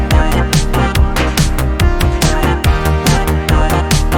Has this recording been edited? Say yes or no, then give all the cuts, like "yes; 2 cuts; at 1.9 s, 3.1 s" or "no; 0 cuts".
no; 0 cuts